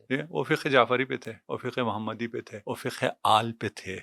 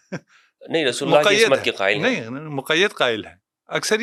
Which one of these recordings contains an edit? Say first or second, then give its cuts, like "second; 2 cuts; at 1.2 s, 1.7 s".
first; 2 cuts; at 1.3 s, 2.5 s